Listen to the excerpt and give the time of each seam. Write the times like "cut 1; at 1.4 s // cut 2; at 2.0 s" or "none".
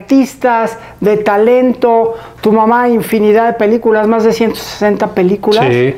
none

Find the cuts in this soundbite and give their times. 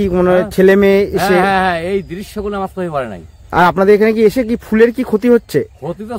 cut 1; at 3.5 s

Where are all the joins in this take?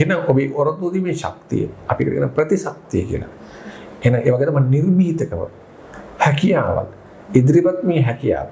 none

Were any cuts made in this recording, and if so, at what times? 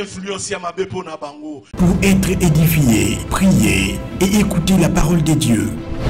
cut 1; at 1.7 s

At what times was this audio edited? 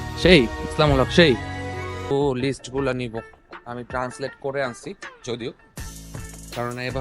cut 1; at 2.1 s

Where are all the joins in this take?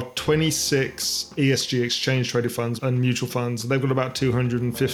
cut 1; at 1.3 s // cut 2; at 2.7 s

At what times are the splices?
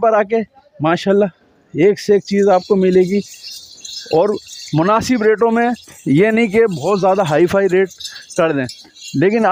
none

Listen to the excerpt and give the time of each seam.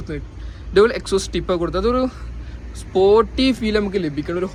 none

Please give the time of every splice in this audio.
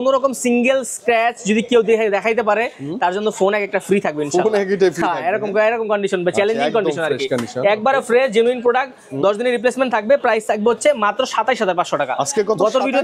none

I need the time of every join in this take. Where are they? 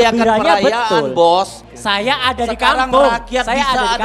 cut 1; at 1.6 s

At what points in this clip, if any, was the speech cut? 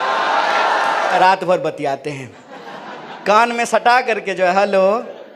cut 1; at 1.1 s

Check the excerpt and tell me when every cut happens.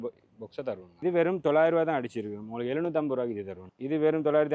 cut 1; at 1.0 s

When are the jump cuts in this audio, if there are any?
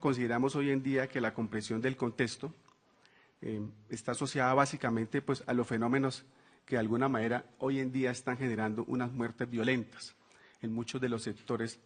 cut 1; at 5.4 s

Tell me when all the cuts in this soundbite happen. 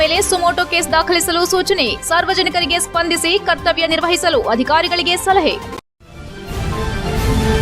cut 1; at 5.7 s

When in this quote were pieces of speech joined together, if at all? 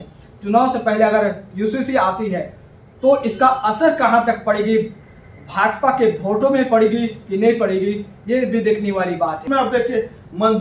cut 1; at 9.4 s

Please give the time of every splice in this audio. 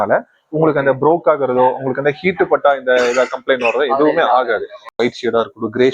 cut 1; at 5.0 s

